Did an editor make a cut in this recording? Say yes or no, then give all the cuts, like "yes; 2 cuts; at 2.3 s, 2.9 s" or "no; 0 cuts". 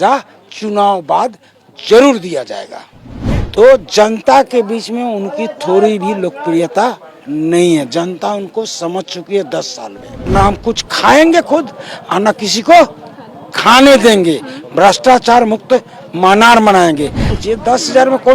yes; 3 cuts; at 3.4 s, 10.3 s, 17.3 s